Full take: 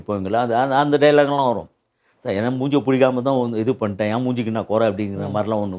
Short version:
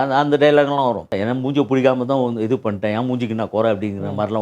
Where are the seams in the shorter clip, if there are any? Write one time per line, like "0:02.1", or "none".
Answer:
0:01.1

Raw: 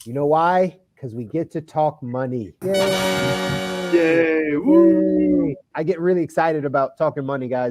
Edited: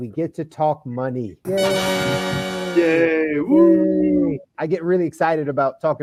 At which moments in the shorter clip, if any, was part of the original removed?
none

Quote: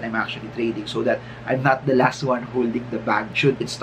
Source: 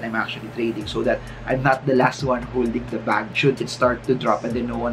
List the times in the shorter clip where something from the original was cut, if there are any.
none

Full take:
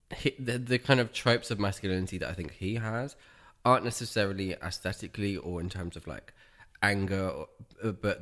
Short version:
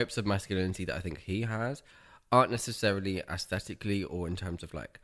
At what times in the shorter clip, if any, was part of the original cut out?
none

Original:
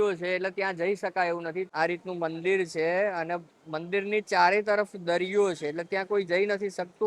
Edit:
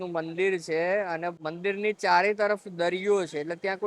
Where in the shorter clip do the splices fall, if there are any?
0:01.4

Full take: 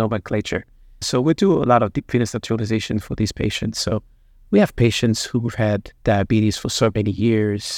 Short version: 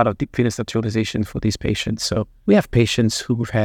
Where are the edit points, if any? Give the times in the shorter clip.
0:02.3

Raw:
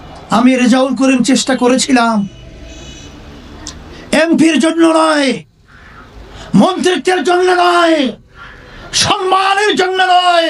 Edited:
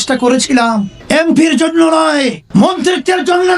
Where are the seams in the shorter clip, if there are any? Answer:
0:01.0
0:02.4

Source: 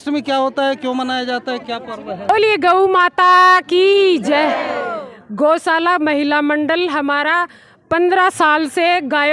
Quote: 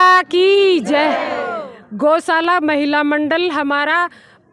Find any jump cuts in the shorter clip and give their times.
none

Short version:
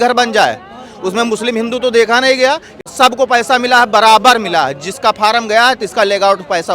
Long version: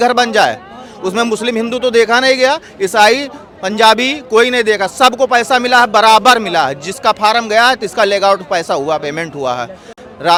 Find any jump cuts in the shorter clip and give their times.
0:02.8

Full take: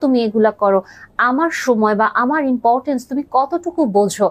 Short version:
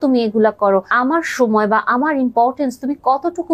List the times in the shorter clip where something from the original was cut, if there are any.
0:00.9

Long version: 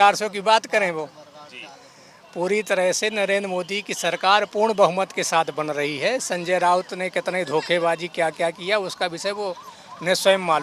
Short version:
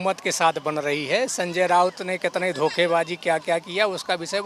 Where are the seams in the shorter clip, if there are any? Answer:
none

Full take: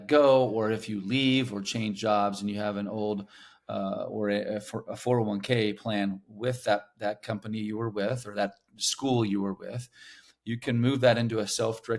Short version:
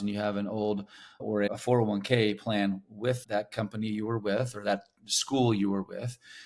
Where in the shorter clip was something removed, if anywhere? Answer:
0:01.3
0:03.2

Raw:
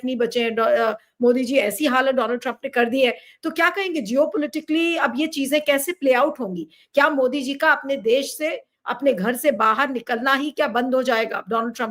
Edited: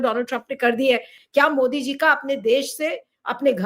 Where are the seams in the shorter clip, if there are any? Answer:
0:01.2

